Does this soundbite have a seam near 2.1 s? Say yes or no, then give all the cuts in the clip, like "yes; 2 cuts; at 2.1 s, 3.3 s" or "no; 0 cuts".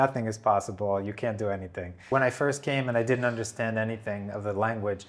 yes; 1 cut; at 2.1 s